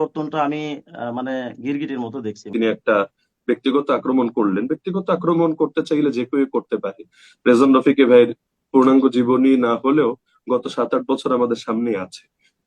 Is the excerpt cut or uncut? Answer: cut